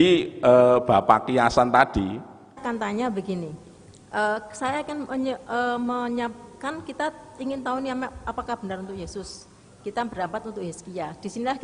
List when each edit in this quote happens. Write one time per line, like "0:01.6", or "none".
0:02.6